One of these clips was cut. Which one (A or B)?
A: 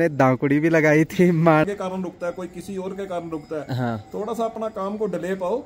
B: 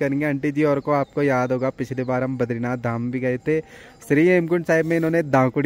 A